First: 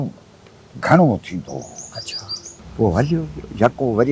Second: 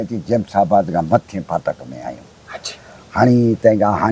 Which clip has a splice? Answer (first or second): first